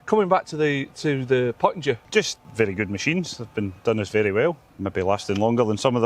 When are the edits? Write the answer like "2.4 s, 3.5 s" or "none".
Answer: 2.2 s, 4.6 s